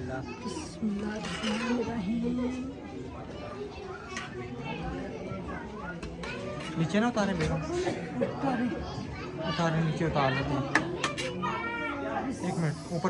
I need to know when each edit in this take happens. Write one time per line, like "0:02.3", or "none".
none